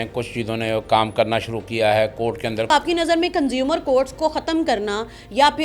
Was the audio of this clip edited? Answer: yes; 1 cut; at 2.7 s

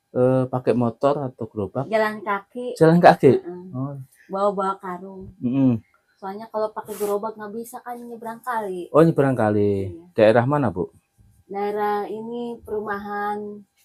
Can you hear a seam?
no; 0 cuts

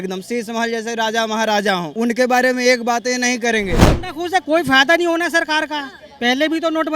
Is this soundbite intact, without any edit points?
no; 2 cuts; at 1.9 s, 4.0 s

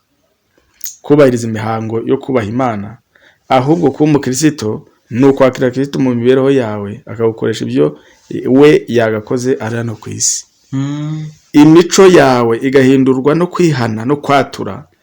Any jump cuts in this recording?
no; 0 cuts

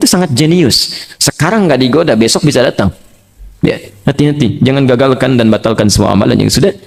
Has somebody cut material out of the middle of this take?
no; 0 cuts

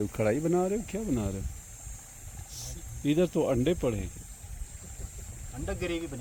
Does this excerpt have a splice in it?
no; 0 cuts

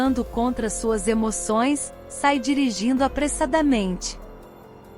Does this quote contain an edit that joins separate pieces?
yes; 1 cut; at 4.0 s

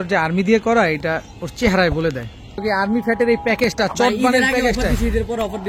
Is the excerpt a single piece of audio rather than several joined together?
no; 1 cut; at 2.6 s

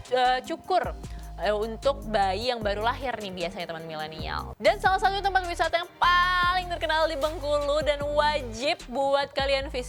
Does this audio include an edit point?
yes; 1 cut; at 4.4 s

